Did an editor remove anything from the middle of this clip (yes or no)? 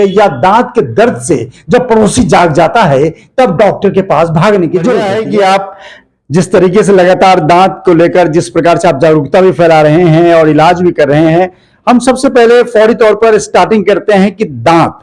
yes